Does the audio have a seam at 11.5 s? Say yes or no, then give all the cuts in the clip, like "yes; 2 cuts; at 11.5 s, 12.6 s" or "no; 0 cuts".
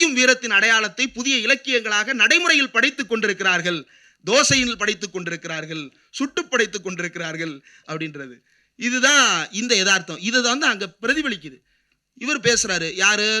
no; 0 cuts